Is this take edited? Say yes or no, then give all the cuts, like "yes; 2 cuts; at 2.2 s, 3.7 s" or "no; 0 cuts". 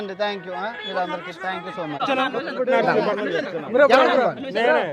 yes; 1 cut; at 2.0 s